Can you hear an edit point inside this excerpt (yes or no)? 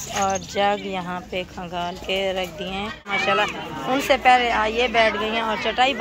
yes